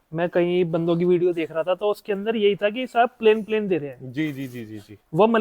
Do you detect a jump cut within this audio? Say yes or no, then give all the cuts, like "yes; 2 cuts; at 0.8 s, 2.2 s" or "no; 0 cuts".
no; 0 cuts